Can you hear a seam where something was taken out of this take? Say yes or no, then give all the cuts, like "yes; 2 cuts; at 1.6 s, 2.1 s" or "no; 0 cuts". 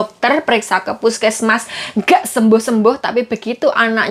no; 0 cuts